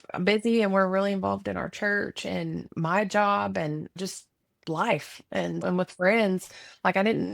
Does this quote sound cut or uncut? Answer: cut